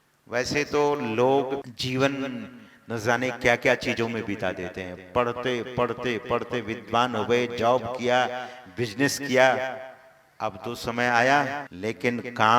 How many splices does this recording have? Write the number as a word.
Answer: two